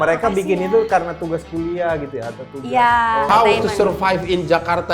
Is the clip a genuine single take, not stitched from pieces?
no; 1 cut; at 3.3 s

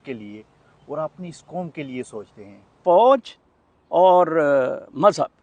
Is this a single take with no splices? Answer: no; 1 cut; at 2.7 s

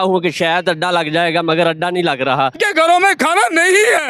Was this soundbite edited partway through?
yes; 1 cut; at 2.6 s

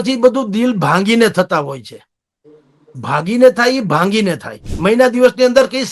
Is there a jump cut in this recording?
yes; 1 cut; at 4.7 s

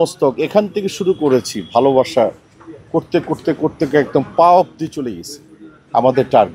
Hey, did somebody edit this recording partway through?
no; 0 cuts

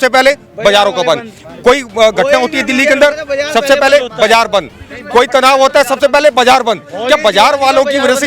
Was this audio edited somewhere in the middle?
no; 0 cuts

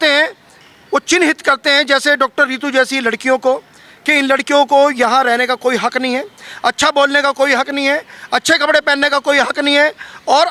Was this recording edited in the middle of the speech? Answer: no; 0 cuts

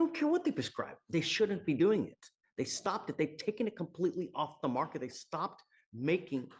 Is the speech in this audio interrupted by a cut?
no; 0 cuts

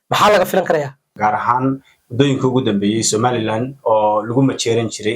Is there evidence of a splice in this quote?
yes; 1 cut; at 1.1 s

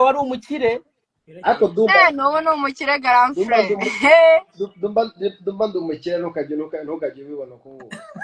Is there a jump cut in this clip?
no; 0 cuts

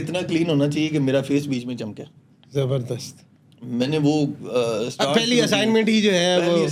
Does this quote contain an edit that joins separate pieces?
no; 0 cuts

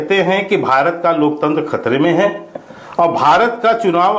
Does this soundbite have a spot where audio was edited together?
no; 0 cuts

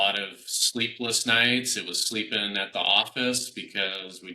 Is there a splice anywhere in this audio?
no; 0 cuts

